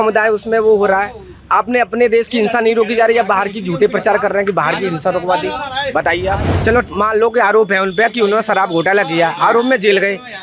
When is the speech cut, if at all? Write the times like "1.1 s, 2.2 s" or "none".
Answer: 6.5 s